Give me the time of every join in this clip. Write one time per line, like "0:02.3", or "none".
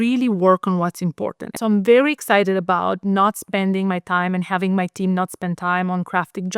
0:01.4